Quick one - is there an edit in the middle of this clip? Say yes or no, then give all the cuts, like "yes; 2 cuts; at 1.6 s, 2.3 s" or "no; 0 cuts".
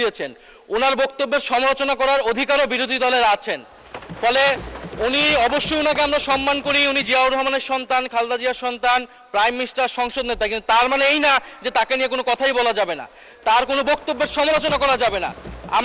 no; 0 cuts